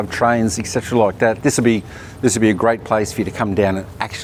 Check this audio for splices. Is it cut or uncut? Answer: uncut